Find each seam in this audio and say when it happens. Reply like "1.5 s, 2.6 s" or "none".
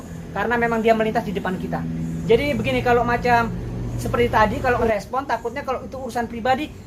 2.2 s, 4.9 s